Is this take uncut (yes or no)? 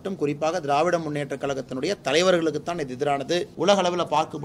no